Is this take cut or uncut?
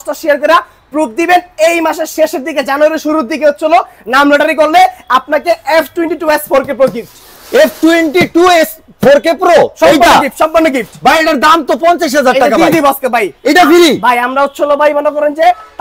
uncut